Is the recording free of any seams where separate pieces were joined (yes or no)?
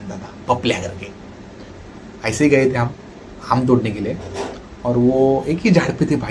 yes